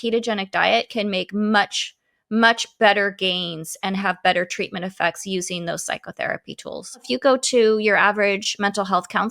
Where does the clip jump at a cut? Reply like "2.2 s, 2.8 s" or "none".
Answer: 7.1 s